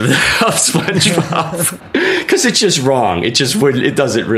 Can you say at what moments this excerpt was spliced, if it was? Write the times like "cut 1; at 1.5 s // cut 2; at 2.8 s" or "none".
cut 1; at 1.7 s